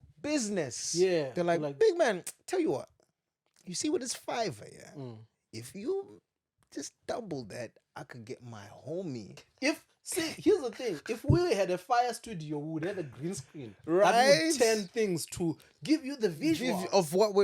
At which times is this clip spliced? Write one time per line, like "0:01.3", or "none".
0:09.4